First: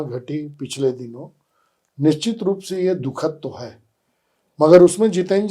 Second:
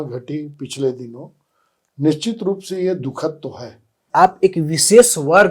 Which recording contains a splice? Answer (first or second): second